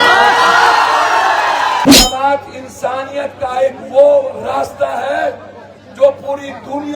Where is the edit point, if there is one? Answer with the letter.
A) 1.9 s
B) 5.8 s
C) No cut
A